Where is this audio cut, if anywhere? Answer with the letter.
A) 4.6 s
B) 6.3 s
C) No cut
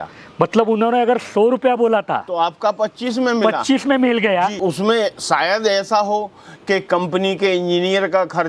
A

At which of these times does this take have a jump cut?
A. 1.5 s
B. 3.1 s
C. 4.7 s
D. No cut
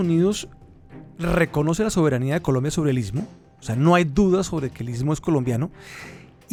D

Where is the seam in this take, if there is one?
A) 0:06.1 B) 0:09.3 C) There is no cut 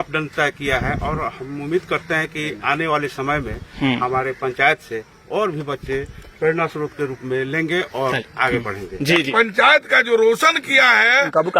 B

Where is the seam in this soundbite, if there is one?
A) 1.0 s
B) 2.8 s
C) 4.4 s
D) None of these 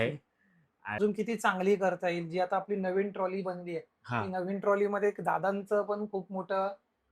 A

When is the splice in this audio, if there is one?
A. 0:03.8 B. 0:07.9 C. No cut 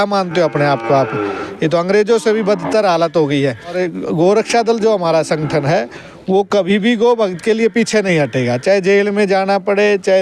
A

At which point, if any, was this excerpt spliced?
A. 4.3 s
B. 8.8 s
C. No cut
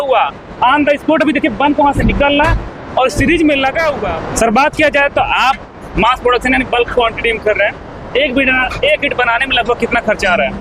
A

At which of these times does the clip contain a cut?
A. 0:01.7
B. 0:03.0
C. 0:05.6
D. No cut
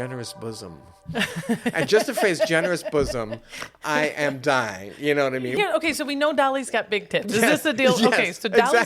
C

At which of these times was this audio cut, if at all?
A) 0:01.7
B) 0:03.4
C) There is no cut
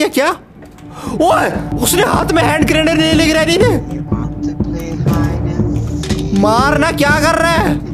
A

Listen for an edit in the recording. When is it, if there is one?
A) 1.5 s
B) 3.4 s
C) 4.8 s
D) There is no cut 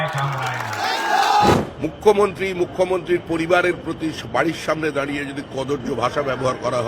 A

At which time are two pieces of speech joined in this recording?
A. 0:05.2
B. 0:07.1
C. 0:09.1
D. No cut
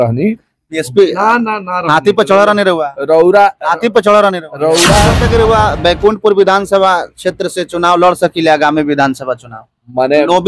A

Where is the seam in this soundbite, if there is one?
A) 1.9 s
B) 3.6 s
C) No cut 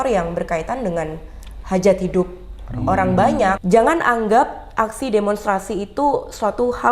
B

